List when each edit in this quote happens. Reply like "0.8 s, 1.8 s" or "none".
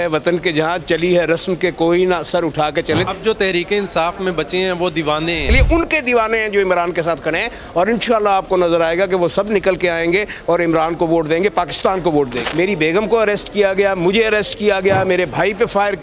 3.1 s, 5.5 s, 12.4 s